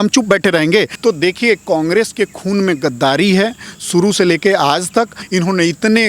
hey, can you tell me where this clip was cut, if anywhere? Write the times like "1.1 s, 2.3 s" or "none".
0.9 s, 5.2 s

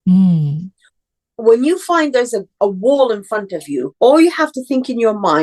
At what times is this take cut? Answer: 2.5 s, 3.9 s

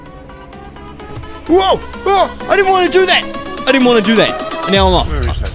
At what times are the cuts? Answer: none

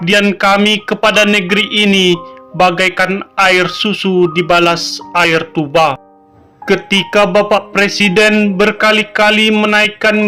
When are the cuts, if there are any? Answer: none

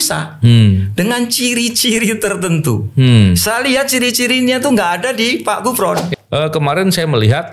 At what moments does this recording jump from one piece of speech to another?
6.1 s

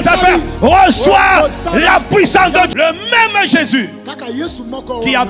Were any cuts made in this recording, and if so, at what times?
2.7 s

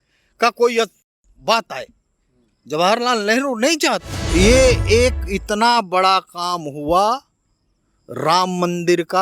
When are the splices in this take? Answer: 4.2 s

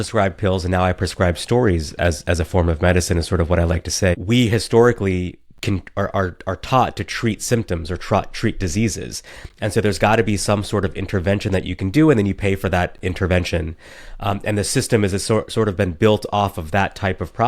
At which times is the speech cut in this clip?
4.2 s

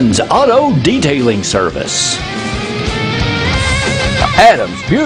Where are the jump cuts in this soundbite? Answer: none

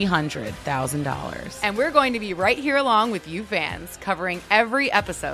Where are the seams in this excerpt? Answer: 1.3 s

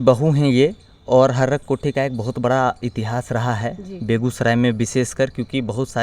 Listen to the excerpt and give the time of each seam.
none

